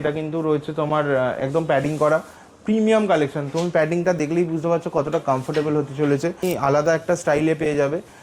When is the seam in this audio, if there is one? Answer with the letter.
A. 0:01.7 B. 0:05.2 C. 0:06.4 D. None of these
C